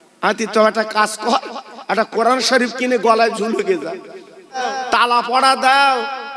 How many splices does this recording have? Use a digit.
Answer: 1